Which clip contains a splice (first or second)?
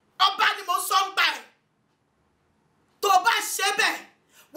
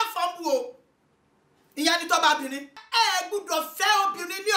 second